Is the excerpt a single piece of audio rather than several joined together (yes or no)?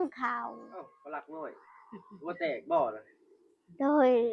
no